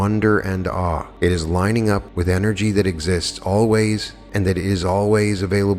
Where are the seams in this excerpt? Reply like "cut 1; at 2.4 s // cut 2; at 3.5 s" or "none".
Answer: cut 1; at 1.1 s // cut 2; at 2.1 s // cut 3; at 4.2 s